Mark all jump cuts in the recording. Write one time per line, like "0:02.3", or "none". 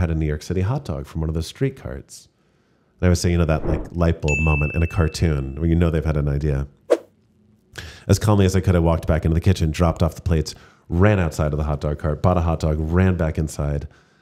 none